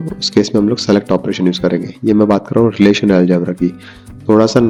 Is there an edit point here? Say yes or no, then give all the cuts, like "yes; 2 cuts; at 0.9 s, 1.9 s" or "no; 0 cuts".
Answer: no; 0 cuts